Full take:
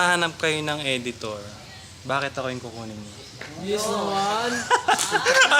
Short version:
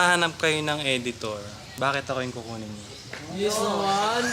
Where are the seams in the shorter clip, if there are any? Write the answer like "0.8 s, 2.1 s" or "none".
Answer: 1.6 s